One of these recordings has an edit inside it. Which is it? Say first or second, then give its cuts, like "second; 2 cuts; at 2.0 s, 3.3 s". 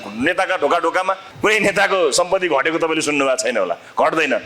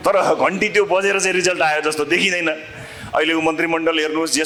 first; 1 cut; at 1.3 s